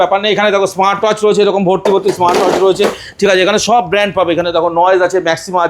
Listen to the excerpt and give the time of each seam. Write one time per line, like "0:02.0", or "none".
none